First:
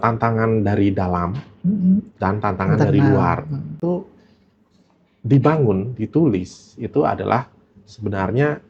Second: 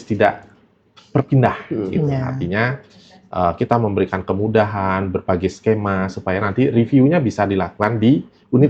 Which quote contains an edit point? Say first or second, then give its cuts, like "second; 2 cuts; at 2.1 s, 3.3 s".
first; 1 cut; at 3.8 s